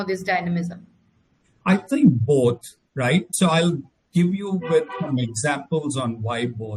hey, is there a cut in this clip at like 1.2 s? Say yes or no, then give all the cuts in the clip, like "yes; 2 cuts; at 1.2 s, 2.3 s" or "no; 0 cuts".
no; 0 cuts